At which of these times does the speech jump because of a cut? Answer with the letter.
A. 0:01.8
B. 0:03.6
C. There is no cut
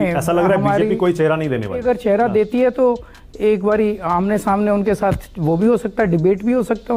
A